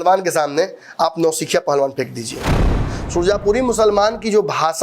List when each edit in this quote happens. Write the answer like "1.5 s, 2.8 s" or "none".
2.8 s